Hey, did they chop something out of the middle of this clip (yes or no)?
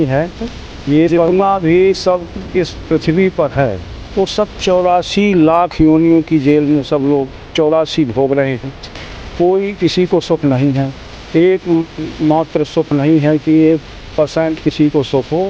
yes